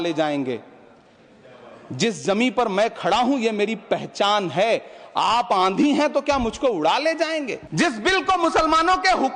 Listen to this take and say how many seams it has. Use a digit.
1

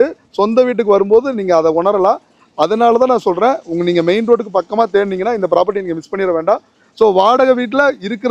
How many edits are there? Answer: 0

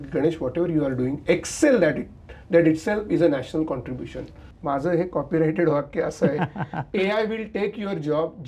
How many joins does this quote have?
1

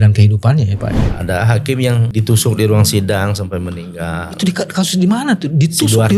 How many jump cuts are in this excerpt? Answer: 2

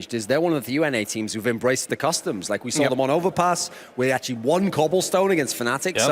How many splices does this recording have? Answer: 1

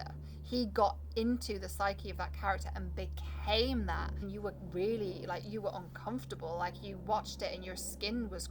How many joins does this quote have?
1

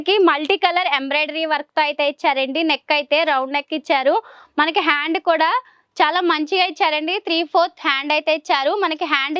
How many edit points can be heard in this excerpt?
0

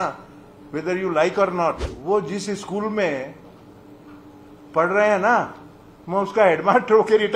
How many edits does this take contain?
1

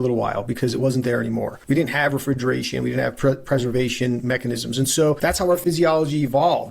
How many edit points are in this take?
2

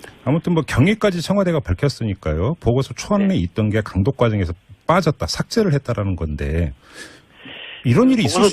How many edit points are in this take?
1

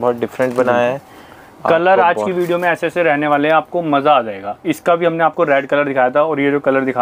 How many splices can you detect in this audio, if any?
0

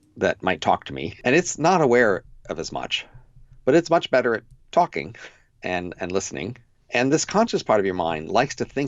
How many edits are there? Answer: 1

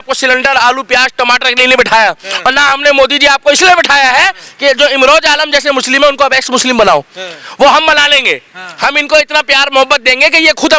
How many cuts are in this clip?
0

